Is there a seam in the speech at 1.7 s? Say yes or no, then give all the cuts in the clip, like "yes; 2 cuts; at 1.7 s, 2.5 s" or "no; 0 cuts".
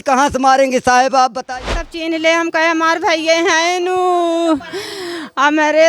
yes; 1 cut; at 1.7 s